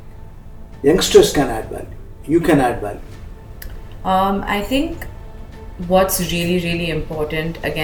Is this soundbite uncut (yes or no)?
yes